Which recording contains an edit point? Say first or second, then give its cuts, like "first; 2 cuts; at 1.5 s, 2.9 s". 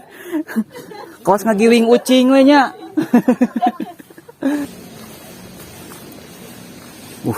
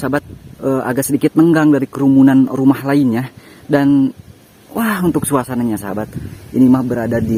first; 1 cut; at 4.6 s